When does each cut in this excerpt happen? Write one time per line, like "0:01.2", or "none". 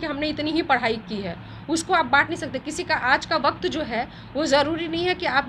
none